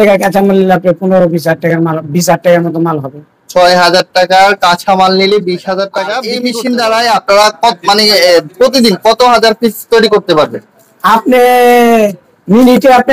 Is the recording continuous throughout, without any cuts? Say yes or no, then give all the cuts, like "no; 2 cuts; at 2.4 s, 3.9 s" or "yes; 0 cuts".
no; 1 cut; at 6.3 s